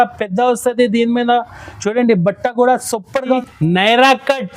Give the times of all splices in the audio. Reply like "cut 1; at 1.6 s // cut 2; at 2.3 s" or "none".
cut 1; at 3.4 s